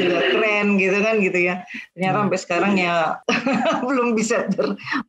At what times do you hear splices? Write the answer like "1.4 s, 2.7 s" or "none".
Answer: 3.2 s